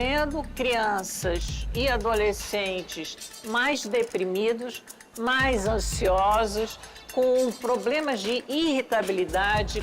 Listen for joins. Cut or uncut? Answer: uncut